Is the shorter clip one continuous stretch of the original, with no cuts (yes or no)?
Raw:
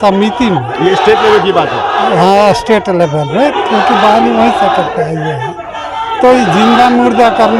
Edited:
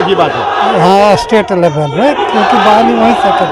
yes